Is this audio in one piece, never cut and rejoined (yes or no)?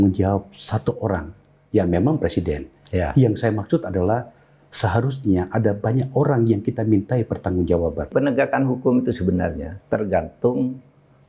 no